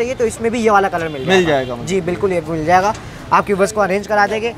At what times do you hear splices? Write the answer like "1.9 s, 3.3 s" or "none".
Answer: none